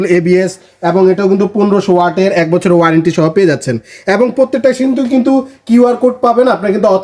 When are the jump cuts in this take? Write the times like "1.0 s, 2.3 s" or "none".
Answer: none